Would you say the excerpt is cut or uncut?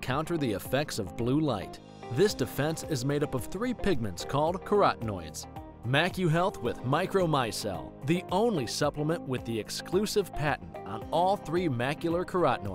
uncut